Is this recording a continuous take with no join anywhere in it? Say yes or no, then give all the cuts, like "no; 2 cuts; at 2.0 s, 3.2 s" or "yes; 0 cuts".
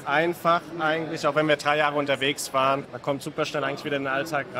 yes; 0 cuts